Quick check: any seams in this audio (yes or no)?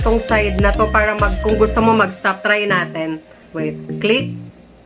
no